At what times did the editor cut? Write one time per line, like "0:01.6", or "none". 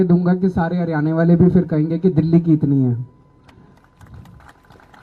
none